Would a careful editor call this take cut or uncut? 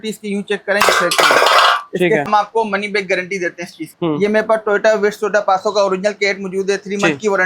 cut